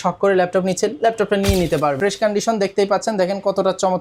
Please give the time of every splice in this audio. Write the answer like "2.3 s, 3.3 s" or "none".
2.0 s